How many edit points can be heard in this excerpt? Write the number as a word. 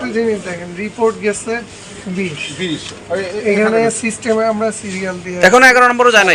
zero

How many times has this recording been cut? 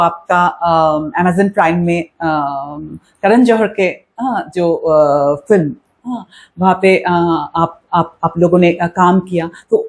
zero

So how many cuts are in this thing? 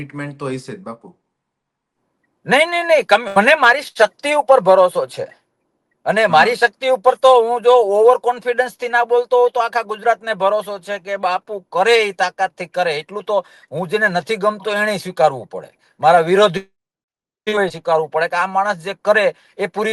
zero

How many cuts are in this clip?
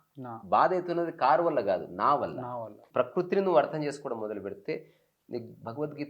one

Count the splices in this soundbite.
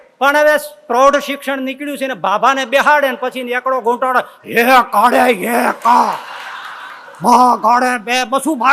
zero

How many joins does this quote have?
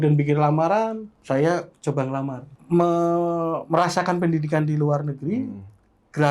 two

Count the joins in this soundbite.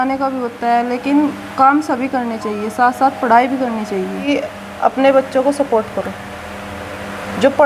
one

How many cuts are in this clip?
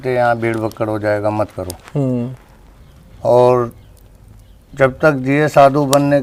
zero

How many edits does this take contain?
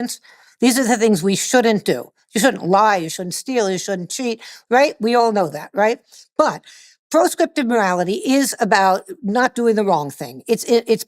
one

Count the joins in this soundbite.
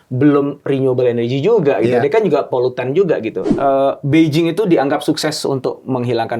one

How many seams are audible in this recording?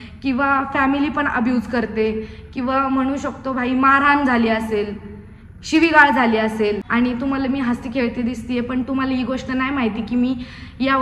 one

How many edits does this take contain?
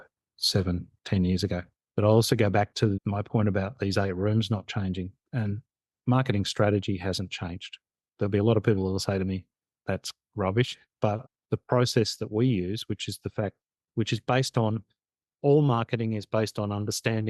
one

